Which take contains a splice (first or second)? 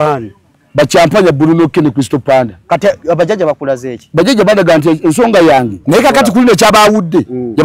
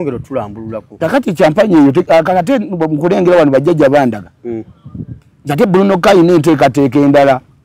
first